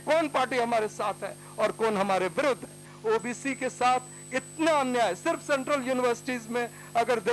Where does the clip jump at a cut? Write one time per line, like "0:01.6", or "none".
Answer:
0:02.9

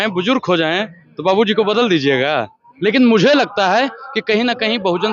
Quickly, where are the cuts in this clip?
0:02.6

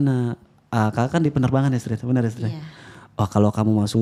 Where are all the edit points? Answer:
none

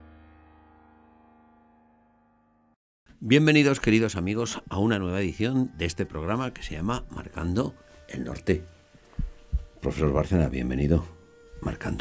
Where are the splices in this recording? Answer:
0:02.0

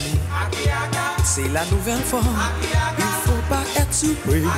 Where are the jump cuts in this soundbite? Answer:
none

